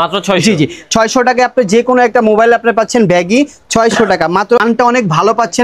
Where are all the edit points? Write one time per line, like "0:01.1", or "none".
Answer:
0:04.6